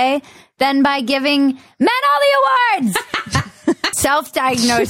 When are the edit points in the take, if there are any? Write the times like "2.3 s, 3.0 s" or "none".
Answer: 3.9 s